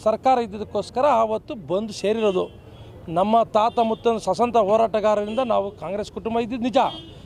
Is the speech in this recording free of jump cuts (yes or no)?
yes